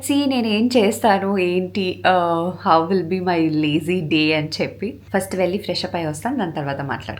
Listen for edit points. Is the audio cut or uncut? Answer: uncut